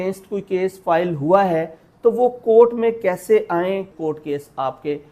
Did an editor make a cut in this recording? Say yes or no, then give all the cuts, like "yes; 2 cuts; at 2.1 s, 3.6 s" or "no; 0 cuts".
yes; 1 cut; at 3.9 s